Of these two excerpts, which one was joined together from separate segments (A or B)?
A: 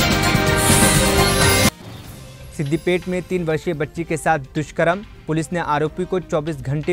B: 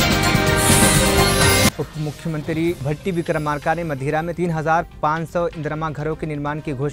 B